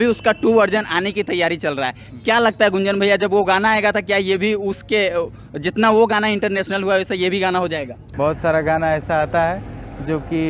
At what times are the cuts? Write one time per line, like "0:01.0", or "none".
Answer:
0:08.0